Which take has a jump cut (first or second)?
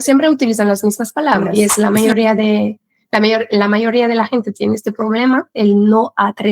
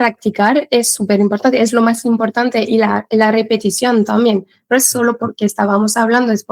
first